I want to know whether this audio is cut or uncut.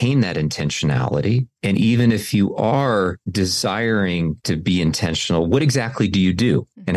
uncut